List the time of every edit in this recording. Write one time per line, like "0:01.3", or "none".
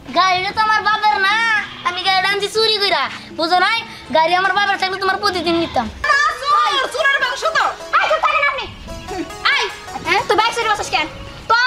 0:06.0